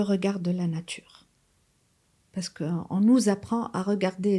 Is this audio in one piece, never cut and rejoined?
yes; 0 cuts

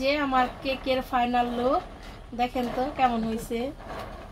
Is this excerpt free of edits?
yes; 0 cuts

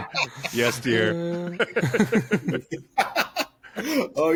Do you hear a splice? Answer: no; 0 cuts

